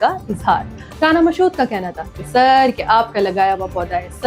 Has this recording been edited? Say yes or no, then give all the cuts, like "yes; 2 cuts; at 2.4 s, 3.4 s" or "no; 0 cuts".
no; 0 cuts